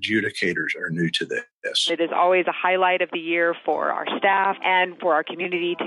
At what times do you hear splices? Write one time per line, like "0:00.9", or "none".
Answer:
0:01.7
0:04.9